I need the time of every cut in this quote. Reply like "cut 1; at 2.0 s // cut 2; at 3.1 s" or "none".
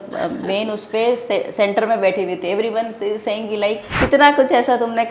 cut 1; at 3.9 s